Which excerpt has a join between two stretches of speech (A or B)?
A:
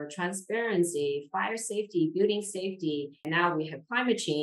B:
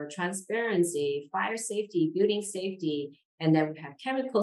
A